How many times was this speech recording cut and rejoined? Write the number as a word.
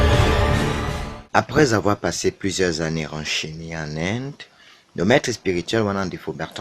one